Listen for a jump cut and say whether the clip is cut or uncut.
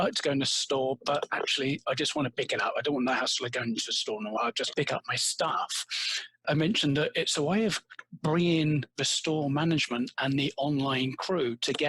cut